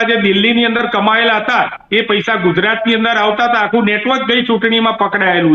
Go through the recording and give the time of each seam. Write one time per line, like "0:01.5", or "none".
none